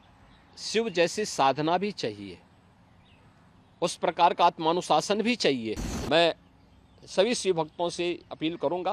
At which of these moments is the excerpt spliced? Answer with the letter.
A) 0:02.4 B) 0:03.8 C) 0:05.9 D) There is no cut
C